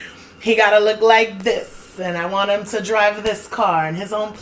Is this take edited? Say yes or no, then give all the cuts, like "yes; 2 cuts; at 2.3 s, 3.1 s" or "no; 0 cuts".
no; 0 cuts